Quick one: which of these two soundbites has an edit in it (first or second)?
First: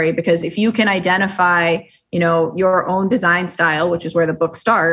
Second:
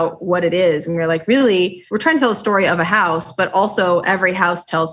second